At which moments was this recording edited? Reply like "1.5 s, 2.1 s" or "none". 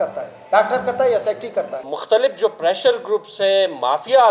1.9 s